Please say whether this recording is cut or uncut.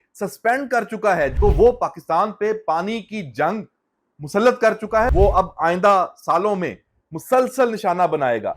cut